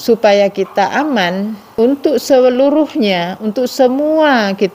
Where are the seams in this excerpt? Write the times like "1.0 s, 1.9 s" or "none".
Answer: 1.6 s